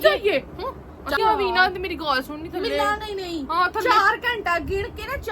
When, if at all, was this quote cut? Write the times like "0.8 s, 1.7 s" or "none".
1.2 s

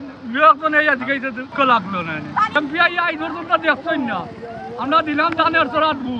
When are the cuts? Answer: 1.5 s, 2.5 s

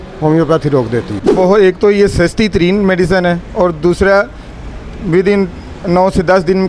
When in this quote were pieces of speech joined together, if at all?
1.2 s

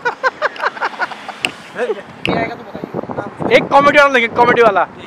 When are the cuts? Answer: 2.3 s

